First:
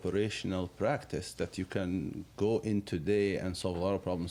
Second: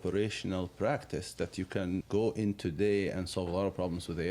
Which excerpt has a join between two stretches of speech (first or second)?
second